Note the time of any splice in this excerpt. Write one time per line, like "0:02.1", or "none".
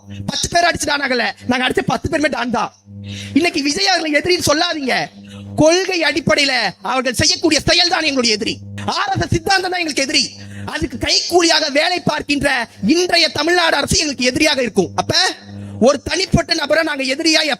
0:08.7